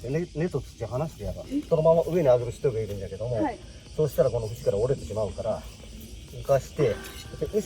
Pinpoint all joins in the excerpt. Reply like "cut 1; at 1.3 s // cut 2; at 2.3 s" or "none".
cut 1; at 1.6 s